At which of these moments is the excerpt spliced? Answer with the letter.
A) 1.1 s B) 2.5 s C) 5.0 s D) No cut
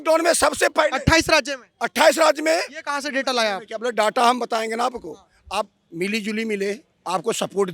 D